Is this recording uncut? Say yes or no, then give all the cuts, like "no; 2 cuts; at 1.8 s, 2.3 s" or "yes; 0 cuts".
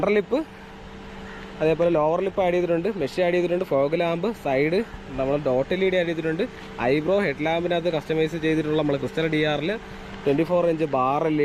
yes; 0 cuts